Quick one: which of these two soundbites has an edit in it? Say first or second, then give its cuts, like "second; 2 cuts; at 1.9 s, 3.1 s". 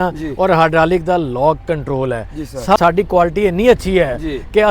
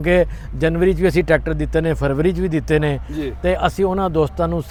first; 1 cut; at 2.8 s